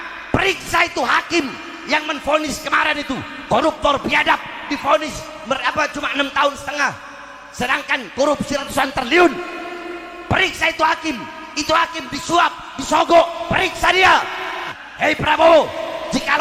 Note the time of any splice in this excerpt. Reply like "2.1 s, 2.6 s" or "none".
14.8 s

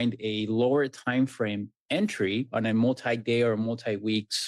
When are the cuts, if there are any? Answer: 1.7 s, 2.5 s

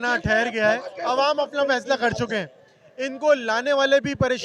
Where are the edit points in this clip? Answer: 0.9 s

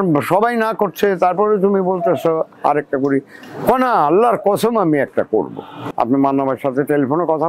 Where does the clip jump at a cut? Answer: 5.9 s

